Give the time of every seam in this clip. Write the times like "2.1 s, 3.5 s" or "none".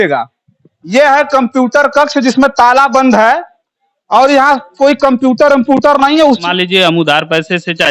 6.4 s

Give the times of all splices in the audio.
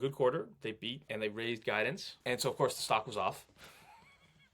1.1 s, 2.1 s

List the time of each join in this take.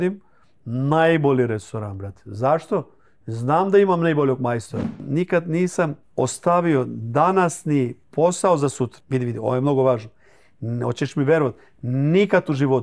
5.0 s, 6.0 s, 8.0 s, 9.0 s

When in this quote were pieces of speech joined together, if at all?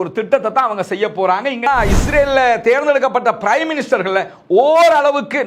1.7 s

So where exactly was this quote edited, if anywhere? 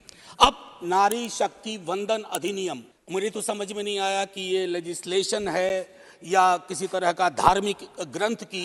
2.9 s

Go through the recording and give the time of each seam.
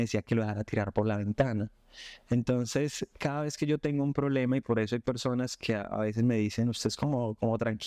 none

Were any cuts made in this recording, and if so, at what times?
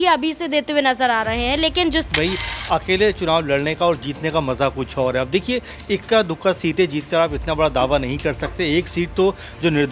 2.1 s

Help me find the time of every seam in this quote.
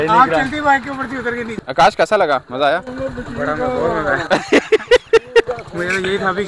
1.5 s

